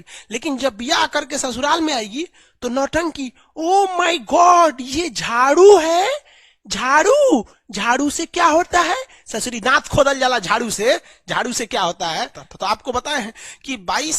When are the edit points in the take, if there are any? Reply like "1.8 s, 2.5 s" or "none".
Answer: 12.4 s